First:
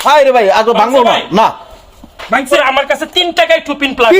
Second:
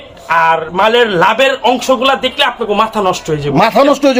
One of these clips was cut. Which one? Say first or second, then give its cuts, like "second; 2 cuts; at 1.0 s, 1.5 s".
first; 1 cut; at 2.5 s